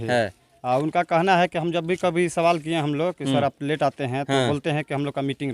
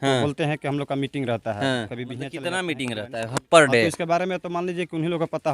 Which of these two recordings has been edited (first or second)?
second